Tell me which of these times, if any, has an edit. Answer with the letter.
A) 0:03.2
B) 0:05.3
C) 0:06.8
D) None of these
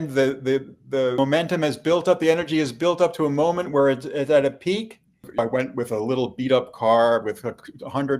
B